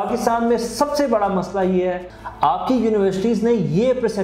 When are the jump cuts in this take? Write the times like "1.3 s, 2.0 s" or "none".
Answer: 2.1 s

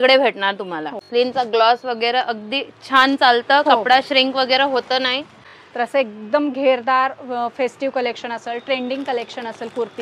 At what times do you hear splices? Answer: 1.0 s, 5.4 s

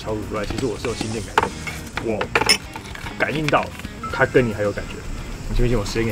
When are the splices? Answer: none

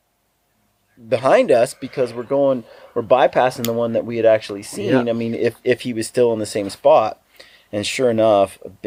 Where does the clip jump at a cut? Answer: none

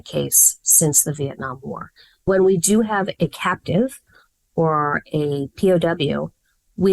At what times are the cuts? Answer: 2.3 s, 3.1 s

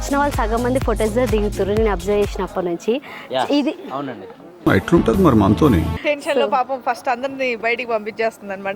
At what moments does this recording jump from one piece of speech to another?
5.9 s

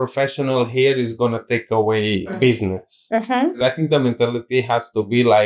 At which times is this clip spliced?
2.3 s, 3.6 s

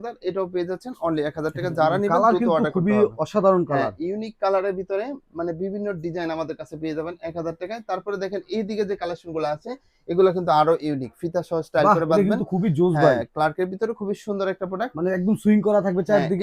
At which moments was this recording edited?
none

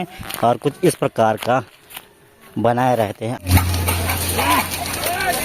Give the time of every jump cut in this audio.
3.4 s

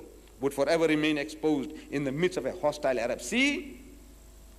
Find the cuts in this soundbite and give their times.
2.8 s

